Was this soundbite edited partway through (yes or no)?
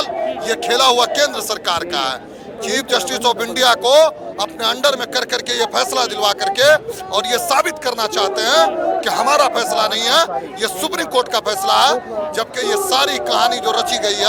no